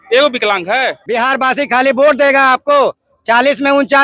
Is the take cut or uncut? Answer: cut